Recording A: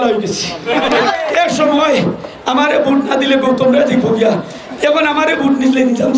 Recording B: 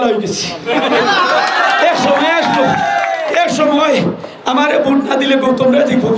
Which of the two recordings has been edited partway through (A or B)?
A